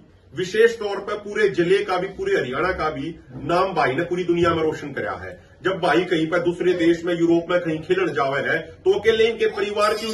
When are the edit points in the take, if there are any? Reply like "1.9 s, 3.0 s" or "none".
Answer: none